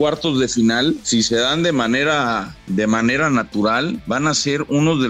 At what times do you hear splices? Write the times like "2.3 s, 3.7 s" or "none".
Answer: 1.0 s, 2.5 s, 4.0 s

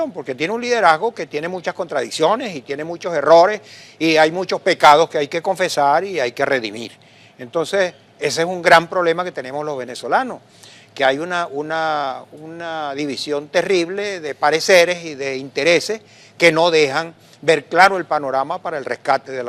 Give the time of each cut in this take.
1.6 s

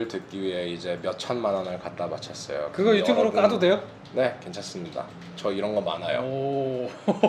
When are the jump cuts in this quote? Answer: none

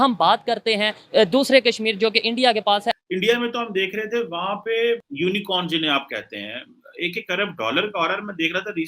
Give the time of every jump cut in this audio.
3.0 s, 5.1 s

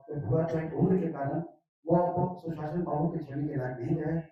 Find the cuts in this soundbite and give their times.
none

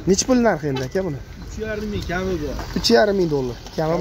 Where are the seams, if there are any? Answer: none

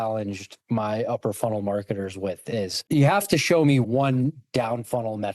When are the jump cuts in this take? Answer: 2.8 s

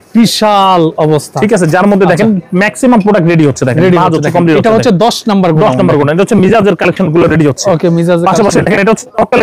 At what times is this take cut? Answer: none

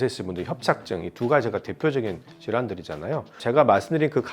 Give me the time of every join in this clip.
3.4 s

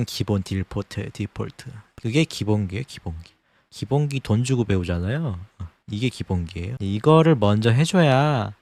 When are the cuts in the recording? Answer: 1.8 s

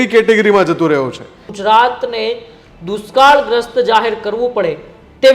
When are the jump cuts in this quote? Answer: 1.5 s

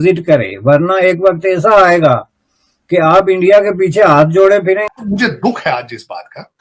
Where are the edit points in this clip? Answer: 4.9 s

